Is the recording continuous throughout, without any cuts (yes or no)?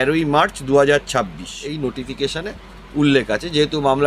no